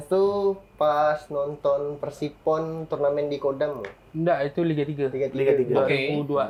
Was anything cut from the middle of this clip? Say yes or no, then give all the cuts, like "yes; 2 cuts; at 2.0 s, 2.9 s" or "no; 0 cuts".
no; 0 cuts